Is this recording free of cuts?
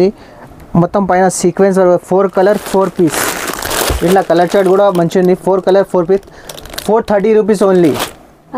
yes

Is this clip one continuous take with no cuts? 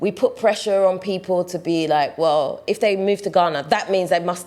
yes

